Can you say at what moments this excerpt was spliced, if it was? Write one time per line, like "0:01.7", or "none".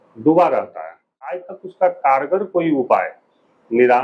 0:01.4